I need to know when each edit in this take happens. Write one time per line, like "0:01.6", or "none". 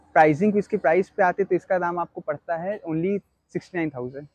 none